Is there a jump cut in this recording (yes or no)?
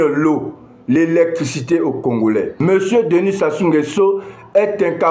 no